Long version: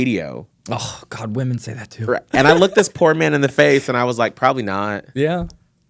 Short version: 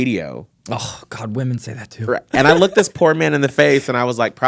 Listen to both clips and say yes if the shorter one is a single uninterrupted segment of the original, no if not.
yes